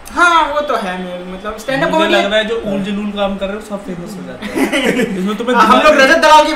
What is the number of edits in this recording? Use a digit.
0